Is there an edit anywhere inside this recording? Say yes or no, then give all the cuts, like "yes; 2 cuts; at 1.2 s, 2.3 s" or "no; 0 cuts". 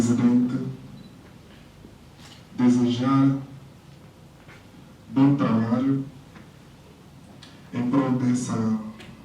no; 0 cuts